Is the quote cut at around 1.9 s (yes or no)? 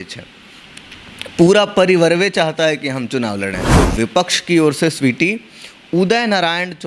no